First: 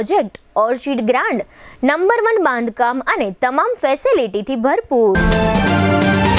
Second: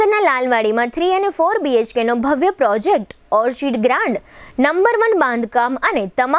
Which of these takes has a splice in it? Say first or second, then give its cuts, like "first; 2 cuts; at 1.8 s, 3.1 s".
first; 1 cut; at 5.2 s